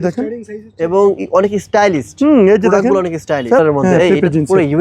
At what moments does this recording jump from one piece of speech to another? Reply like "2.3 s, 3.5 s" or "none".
3.6 s